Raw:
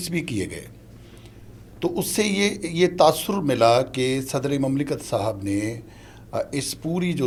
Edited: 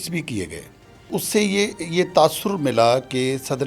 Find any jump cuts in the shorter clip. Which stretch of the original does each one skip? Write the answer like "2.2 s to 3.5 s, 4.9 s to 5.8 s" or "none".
1.1 s to 1.9 s